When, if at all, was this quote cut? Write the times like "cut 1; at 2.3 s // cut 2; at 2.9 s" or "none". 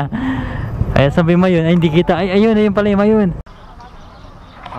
cut 1; at 3.5 s